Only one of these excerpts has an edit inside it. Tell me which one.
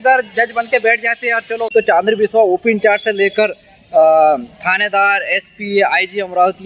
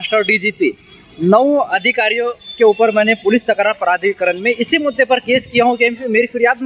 first; 1 cut; at 1.7 s

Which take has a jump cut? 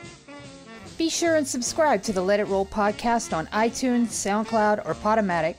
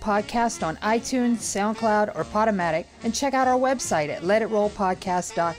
first; 1 cut; at 0.9 s

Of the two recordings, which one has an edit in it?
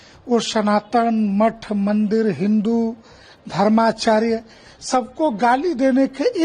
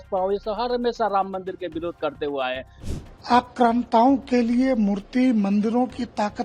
second; 1 cut; at 2.7 s

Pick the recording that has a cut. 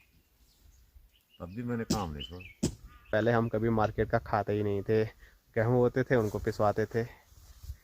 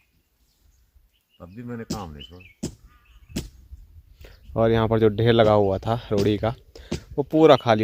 first; 1 cut; at 3.1 s

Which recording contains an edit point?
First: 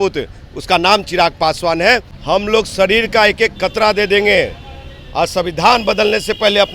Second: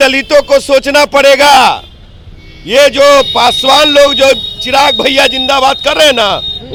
first; 1 cut; at 2.1 s

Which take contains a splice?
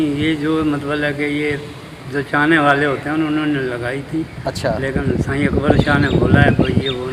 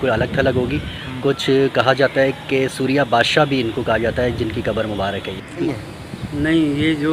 second; 1 cut; at 5.6 s

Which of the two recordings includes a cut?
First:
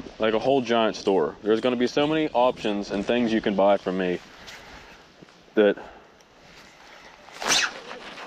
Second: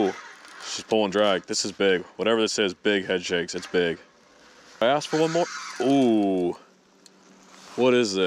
second; 1 cut; at 4.8 s

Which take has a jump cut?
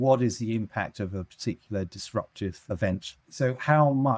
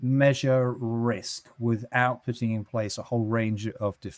first; 1 cut; at 3.2 s

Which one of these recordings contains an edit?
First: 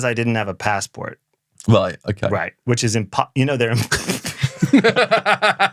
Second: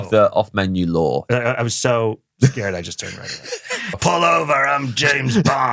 second; 2 cuts; at 1.2 s, 4.0 s

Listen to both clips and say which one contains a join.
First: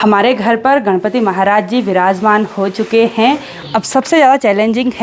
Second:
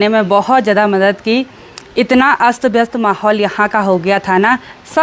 first; 1 cut; at 3.5 s

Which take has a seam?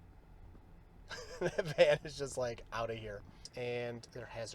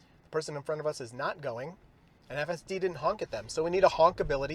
first; 1 cut; at 3.5 s

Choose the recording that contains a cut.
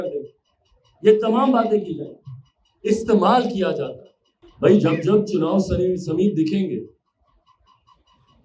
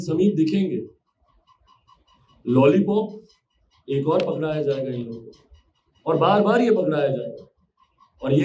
first; 1 cut; at 4.5 s

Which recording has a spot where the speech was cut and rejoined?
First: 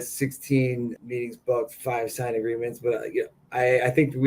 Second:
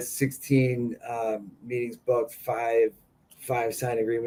first; 2 cuts; at 1.0 s, 1.8 s

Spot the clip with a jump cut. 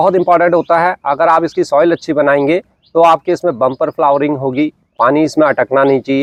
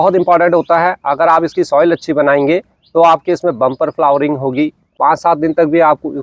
second; 1 cut; at 4.8 s

